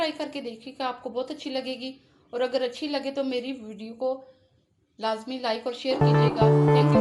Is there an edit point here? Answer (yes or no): yes